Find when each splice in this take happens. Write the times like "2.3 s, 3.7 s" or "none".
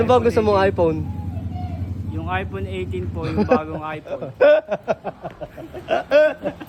none